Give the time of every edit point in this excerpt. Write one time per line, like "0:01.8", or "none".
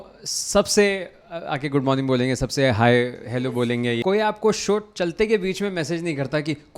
0:04.0